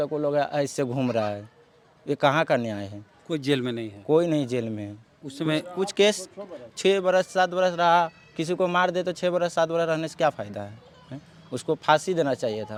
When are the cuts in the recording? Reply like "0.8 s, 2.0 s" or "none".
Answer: none